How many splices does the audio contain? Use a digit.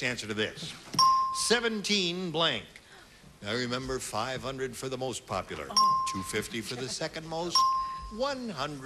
0